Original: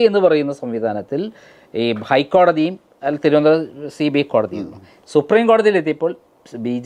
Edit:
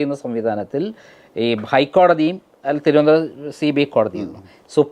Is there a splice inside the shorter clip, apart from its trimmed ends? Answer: no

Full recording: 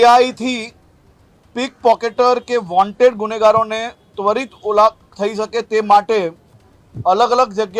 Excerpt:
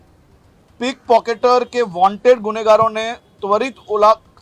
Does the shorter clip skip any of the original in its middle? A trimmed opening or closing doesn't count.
no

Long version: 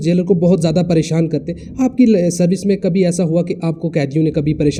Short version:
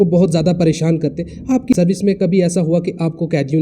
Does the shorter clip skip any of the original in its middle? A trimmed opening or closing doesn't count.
yes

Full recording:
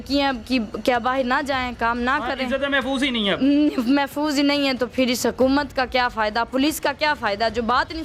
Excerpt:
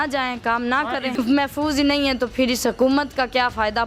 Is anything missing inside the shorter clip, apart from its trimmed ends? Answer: yes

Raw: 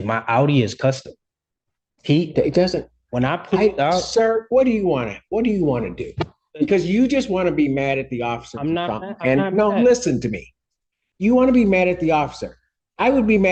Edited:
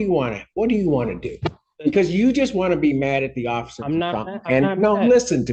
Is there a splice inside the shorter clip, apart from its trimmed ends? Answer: no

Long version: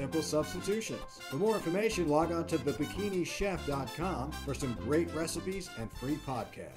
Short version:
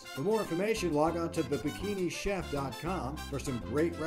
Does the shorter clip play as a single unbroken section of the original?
yes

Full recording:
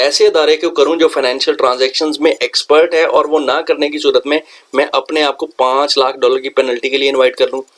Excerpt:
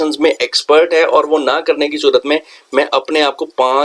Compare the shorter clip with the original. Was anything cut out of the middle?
no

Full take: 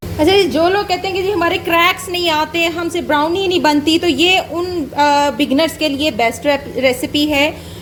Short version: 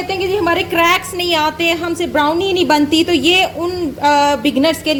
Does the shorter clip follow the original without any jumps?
yes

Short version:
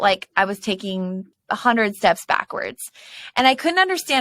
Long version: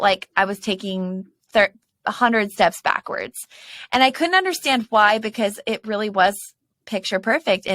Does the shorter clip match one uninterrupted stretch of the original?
no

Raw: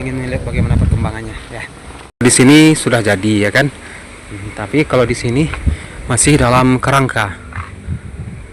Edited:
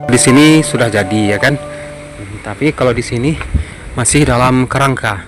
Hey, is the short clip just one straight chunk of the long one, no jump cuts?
yes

